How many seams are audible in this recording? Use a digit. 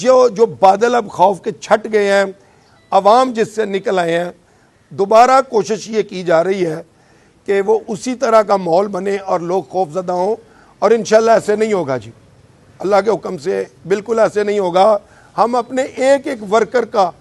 0